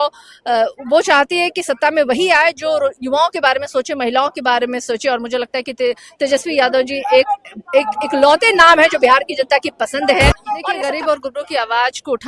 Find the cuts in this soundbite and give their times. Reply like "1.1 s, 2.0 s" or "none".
10.7 s